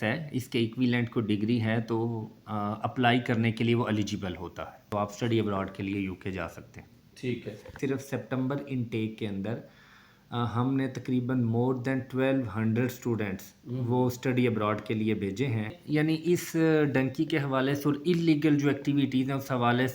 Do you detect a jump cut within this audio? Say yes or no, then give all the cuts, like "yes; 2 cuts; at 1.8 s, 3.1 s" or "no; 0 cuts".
yes; 3 cuts; at 4.9 s, 7.7 s, 15.8 s